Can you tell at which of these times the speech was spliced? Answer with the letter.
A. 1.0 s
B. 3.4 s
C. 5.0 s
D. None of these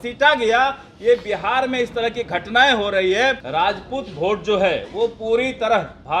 B